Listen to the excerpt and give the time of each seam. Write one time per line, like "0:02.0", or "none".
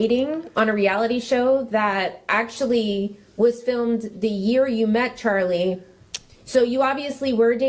none